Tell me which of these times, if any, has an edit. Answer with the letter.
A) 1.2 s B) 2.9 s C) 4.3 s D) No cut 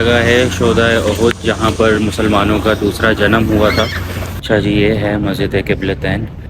C